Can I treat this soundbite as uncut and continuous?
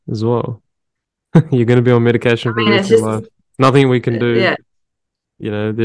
yes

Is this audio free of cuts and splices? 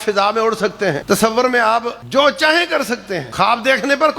no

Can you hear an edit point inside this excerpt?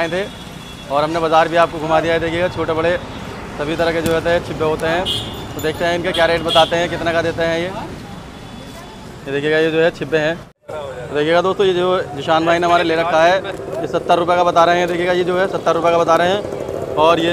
no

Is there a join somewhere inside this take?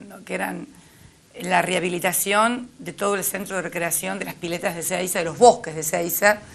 no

